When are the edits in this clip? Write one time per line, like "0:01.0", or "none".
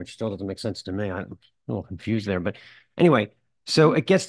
none